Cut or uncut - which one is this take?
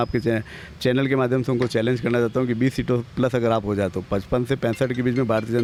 uncut